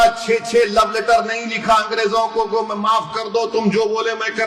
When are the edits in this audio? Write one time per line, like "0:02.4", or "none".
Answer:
none